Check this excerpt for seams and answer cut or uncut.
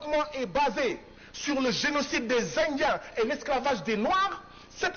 uncut